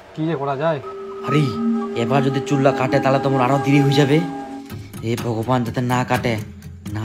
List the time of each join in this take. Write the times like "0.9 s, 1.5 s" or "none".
0.9 s